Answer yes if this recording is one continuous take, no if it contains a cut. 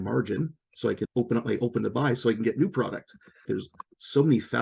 no